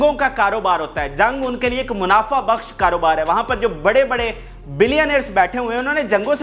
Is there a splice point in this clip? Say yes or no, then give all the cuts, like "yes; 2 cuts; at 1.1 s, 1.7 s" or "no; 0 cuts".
no; 0 cuts